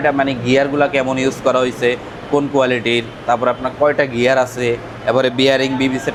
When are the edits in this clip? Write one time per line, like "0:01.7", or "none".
none